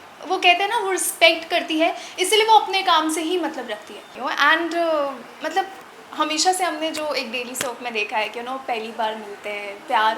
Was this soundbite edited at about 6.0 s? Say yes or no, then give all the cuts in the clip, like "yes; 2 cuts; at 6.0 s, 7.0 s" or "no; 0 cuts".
no; 1 cut; at 4.1 s